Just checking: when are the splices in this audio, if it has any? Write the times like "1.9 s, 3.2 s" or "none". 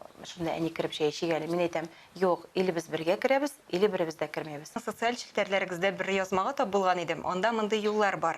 4.9 s